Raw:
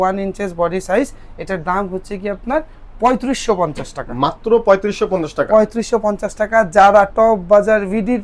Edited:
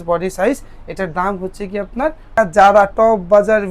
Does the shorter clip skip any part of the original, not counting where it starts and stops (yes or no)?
yes